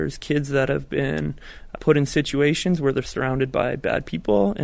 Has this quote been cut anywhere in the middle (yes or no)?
no